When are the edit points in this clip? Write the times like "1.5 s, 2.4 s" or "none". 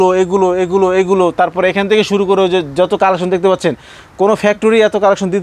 none